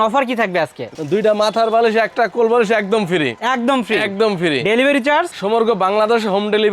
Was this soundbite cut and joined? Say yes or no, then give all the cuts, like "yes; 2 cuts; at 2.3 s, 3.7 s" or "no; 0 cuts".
yes; 1 cut; at 0.9 s